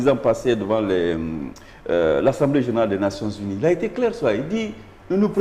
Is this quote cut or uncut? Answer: uncut